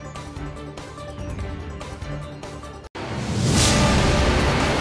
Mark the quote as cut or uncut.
cut